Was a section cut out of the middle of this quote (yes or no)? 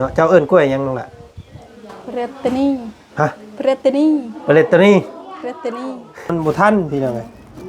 yes